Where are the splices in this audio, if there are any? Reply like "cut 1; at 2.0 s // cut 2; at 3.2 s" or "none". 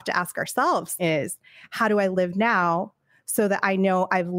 cut 1; at 0.9 s